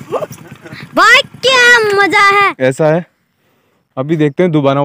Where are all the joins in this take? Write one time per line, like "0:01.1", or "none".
0:02.5